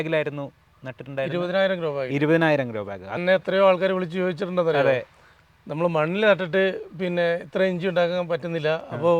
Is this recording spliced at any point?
yes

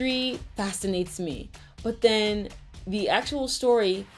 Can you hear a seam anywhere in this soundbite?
no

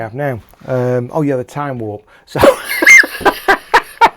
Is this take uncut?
yes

